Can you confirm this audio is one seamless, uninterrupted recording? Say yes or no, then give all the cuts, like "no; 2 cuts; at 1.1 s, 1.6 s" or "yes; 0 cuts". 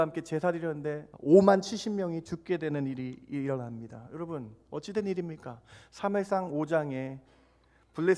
no; 1 cut; at 1.1 s